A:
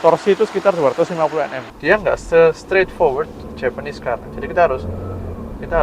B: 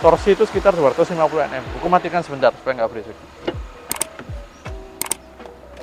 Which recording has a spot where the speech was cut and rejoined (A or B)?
A